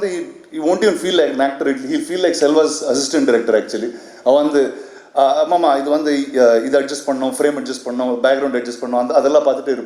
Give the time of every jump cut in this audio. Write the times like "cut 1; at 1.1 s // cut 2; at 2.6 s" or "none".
none